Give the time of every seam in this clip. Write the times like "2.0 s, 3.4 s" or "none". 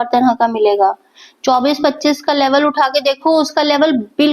none